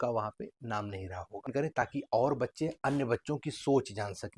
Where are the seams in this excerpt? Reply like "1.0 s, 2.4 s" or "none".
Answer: 1.5 s